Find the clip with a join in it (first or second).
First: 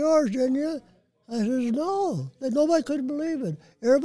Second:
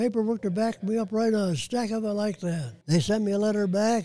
second